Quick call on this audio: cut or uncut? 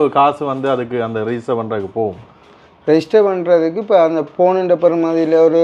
uncut